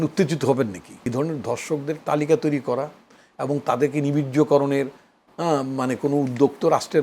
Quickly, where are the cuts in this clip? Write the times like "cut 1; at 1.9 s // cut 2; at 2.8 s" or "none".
cut 1; at 0.9 s